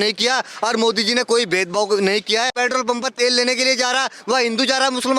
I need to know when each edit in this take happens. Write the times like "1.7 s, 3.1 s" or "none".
2.5 s